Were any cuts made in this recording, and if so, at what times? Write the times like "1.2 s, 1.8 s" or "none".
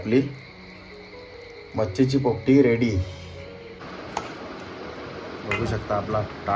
3.8 s